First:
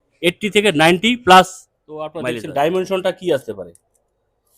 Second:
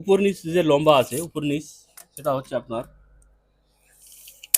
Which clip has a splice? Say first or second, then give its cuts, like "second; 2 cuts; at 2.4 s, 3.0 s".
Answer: first; 1 cut; at 2.1 s